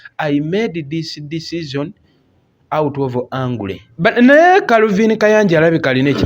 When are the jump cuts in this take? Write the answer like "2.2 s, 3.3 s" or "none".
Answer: 3.8 s